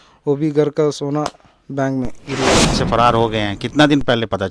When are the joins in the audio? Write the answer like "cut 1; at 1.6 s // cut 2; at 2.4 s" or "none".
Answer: cut 1; at 2.8 s